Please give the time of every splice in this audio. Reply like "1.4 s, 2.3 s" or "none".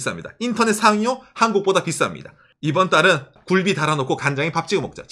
2.5 s, 3.3 s